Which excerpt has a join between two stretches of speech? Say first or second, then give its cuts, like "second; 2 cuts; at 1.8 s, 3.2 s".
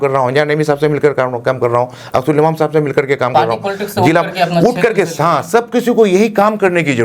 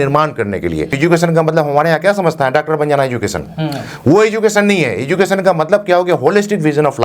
second; 1 cut; at 1.0 s